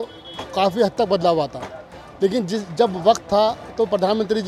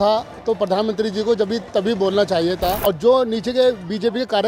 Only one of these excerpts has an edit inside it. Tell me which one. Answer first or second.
second